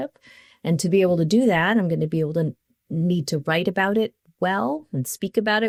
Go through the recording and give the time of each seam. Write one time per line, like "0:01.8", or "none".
none